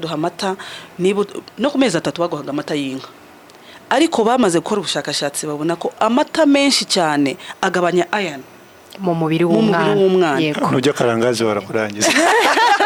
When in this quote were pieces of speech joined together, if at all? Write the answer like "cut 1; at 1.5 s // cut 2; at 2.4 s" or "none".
none